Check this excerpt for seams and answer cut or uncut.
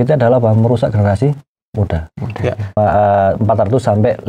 cut